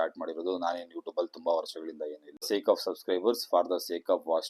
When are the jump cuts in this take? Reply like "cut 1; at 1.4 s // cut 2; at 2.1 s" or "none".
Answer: cut 1; at 2.4 s